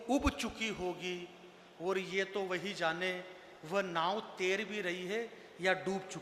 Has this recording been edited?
no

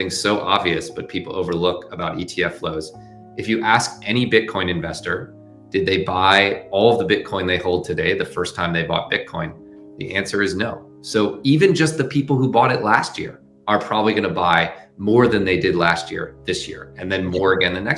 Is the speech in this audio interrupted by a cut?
no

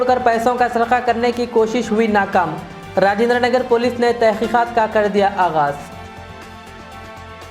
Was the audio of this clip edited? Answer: no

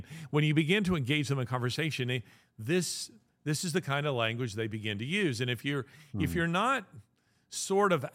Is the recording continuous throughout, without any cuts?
yes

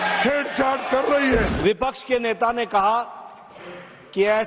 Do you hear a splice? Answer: yes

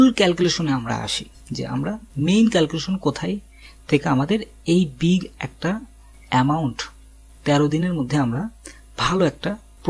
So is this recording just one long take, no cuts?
yes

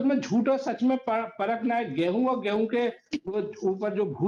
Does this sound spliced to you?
no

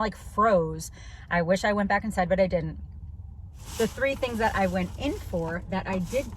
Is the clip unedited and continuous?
no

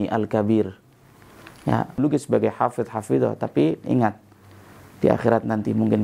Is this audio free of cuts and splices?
no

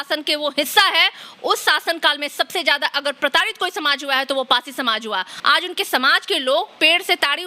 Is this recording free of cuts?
no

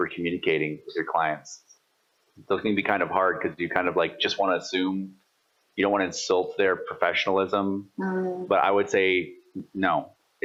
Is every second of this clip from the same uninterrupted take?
yes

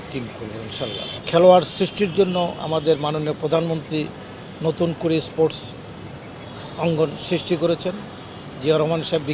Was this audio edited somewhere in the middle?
yes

